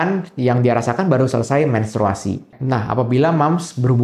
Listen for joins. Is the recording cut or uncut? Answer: cut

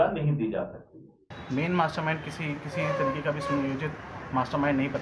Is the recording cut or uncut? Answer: cut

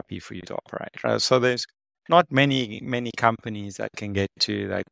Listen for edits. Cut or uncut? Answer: uncut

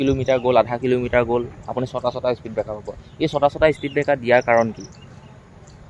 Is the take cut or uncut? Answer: uncut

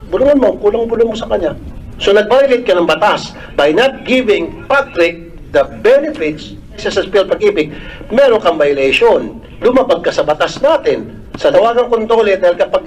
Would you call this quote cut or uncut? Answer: cut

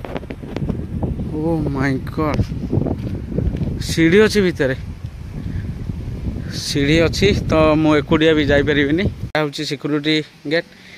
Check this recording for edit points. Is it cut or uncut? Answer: cut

